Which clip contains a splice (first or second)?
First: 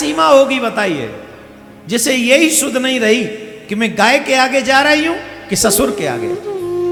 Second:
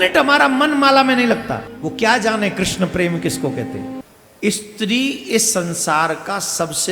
second